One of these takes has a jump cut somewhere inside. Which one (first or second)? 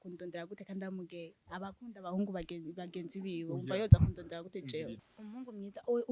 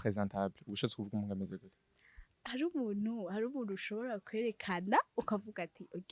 first